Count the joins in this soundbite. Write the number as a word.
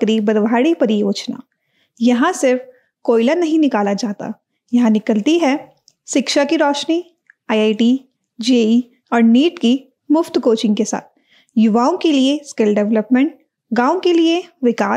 zero